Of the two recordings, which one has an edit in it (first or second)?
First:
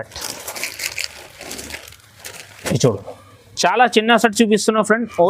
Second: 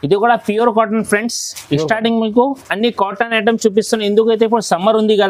first